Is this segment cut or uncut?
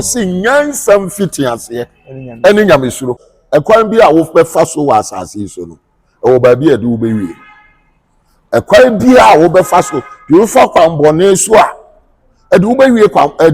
cut